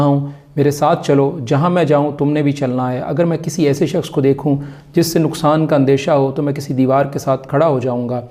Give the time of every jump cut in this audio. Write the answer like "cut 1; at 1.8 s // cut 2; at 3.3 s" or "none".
none